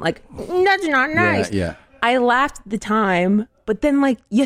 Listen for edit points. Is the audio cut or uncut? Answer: uncut